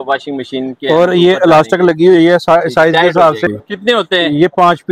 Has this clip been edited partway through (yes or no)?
yes